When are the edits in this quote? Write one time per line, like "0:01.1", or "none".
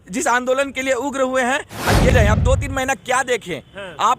0:02.1